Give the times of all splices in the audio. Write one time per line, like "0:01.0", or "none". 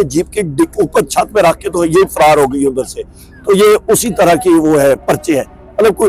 none